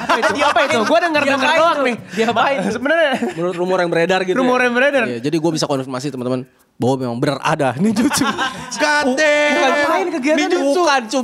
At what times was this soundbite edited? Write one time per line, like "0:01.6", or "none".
none